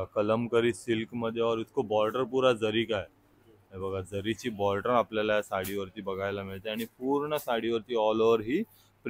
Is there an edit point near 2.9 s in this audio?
no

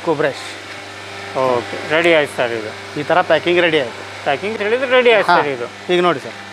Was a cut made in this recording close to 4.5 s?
yes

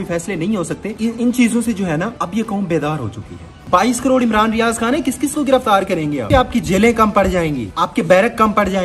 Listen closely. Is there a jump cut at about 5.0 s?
no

